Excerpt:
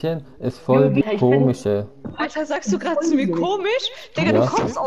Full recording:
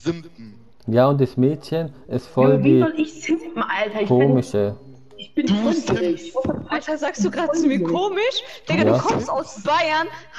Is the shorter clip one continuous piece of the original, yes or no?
no